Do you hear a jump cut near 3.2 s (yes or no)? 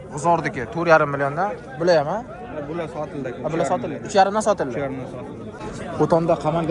no